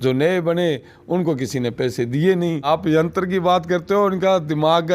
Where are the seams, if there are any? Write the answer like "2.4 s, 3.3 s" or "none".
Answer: 2.7 s